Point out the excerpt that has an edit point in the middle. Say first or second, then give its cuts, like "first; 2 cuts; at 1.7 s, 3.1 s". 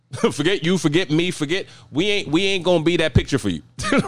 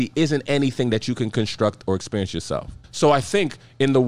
second; 1 cut; at 2.8 s